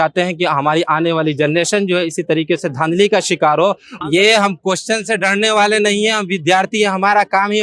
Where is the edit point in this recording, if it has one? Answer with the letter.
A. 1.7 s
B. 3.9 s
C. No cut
B